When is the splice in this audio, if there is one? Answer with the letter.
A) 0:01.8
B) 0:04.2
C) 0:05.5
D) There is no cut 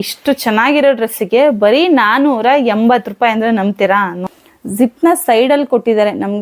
B